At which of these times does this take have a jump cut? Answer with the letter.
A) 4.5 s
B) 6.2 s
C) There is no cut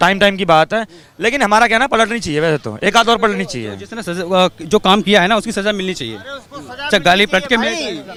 C